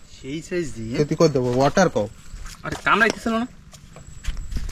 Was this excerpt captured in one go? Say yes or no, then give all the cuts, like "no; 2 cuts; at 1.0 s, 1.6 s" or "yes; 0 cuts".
yes; 0 cuts